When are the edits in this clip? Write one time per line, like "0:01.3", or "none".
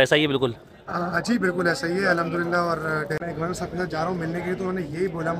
0:03.2